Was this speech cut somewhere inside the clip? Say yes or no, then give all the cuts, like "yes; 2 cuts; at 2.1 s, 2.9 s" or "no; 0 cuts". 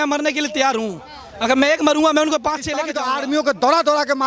yes; 1 cut; at 2.9 s